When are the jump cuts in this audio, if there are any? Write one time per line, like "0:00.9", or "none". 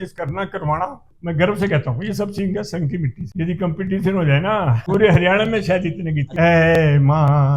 0:01.1
0:03.2
0:04.8
0:06.2